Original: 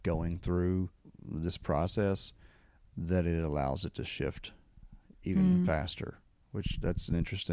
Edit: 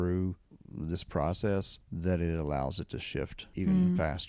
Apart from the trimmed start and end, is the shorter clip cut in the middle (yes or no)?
yes